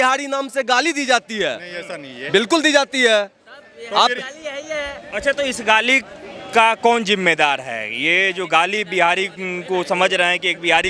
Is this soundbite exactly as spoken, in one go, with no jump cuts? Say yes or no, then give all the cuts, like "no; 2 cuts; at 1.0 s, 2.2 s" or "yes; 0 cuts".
yes; 0 cuts